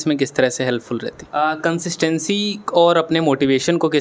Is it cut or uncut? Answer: cut